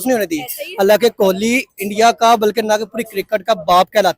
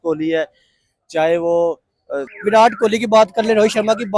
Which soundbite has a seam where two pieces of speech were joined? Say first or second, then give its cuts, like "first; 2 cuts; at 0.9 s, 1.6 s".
second; 1 cut; at 2.3 s